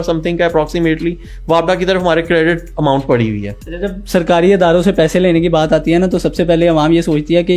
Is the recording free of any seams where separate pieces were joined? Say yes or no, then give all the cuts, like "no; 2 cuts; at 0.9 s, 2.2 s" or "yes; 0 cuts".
yes; 0 cuts